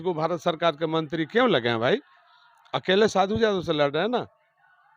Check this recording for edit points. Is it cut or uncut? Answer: uncut